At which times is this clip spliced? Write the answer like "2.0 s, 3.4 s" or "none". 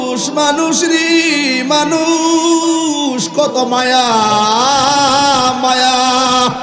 none